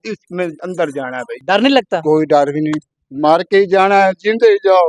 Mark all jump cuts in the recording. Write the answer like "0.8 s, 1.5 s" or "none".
1.4 s